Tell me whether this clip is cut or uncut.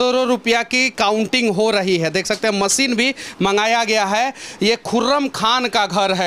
uncut